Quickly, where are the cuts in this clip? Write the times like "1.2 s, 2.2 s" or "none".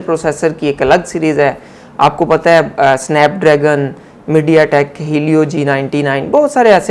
none